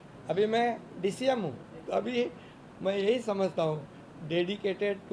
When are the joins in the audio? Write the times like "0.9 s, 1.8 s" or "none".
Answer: 1.7 s